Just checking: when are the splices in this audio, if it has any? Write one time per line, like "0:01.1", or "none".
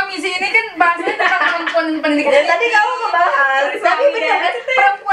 none